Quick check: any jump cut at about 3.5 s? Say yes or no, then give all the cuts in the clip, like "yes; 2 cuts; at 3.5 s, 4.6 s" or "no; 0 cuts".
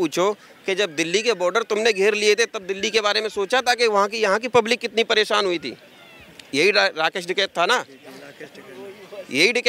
no; 0 cuts